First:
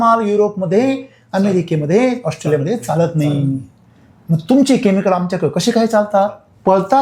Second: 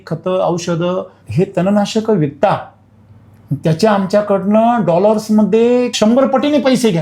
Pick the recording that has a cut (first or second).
second